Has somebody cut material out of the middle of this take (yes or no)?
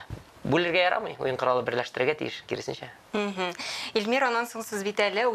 no